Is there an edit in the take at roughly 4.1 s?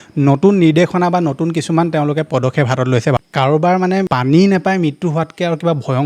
yes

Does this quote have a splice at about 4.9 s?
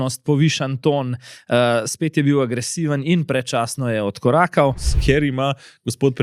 yes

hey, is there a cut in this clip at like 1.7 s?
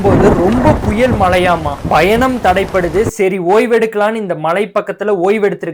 yes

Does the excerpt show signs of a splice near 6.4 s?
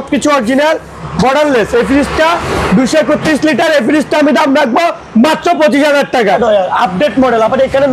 yes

